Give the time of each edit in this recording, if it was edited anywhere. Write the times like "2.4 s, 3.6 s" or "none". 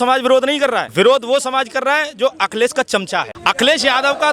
3.3 s